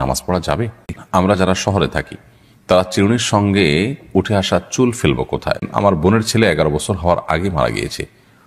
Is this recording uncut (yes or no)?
no